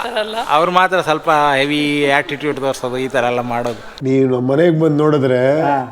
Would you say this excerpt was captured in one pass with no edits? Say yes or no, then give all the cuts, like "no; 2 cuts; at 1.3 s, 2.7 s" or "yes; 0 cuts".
no; 1 cut; at 3.9 s